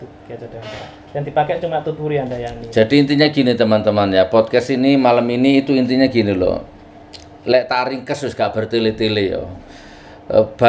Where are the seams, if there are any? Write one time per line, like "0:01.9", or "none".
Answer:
none